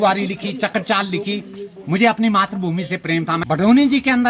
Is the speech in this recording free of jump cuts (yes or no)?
no